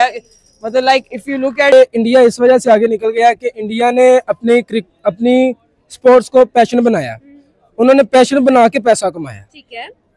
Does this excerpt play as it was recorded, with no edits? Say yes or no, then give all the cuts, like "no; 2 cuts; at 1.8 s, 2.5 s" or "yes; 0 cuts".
no; 1 cut; at 1.7 s